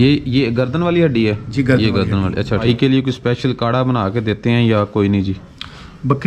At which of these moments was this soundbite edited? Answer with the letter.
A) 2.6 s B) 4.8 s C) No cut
A